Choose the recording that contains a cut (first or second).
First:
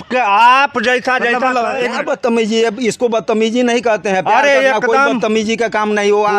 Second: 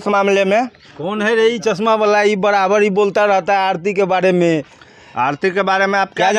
first